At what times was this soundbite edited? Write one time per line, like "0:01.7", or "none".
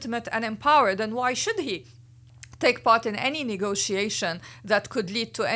none